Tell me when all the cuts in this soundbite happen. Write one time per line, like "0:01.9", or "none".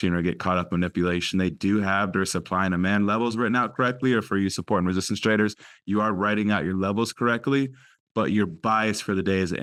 none